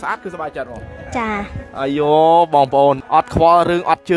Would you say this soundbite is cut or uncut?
cut